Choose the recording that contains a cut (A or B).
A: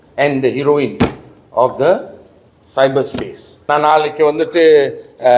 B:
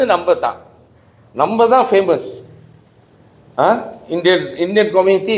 A